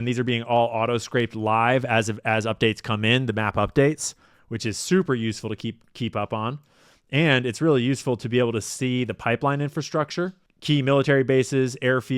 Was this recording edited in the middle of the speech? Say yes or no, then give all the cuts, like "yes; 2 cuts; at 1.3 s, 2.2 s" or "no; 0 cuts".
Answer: yes; 1 cut; at 10.5 s